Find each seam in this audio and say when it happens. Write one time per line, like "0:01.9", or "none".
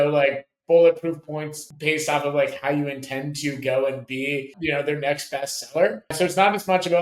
0:01.6
0:04.5
0:06.1